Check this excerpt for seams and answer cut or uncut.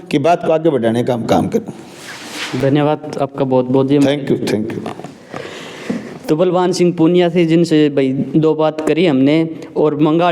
uncut